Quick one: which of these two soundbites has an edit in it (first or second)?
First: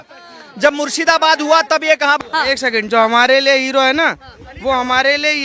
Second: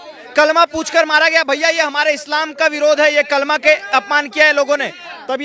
first